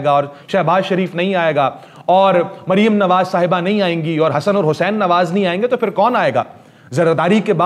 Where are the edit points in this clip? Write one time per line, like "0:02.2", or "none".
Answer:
none